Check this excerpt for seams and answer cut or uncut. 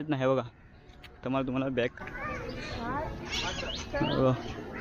cut